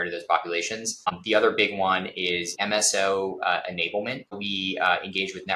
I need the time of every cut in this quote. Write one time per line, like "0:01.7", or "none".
0:01.0
0:02.6
0:04.3